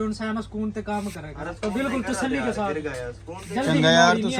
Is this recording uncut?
yes; 0 cuts

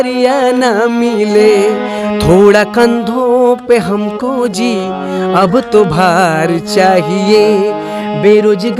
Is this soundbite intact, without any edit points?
no; 1 cut; at 2.0 s

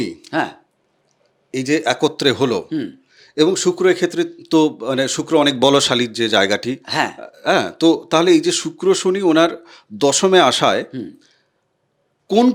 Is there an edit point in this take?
no; 0 cuts

